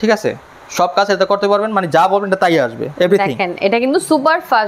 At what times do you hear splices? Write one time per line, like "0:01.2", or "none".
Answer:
0:02.8